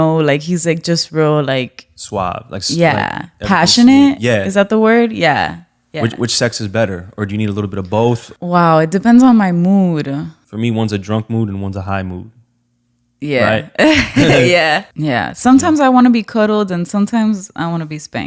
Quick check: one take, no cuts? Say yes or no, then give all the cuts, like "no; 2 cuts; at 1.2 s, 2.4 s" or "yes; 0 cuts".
no; 3 cuts; at 8.3 s, 10.4 s, 14.9 s